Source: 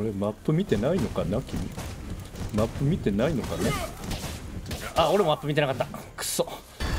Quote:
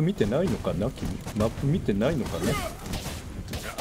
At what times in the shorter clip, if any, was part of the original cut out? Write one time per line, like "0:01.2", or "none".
0:01.2

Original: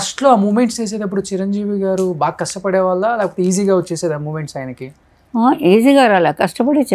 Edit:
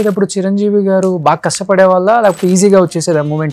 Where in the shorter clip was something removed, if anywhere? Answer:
none

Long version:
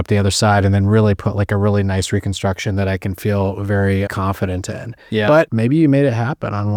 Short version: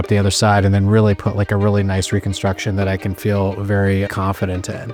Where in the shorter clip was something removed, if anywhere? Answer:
none

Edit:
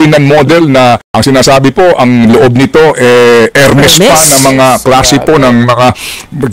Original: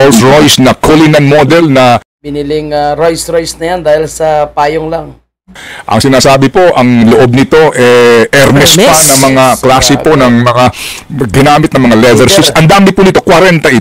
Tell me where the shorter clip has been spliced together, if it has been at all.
0:01.1

